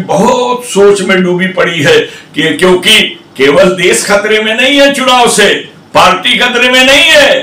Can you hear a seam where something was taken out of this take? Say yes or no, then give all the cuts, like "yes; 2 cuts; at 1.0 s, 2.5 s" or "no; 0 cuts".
no; 0 cuts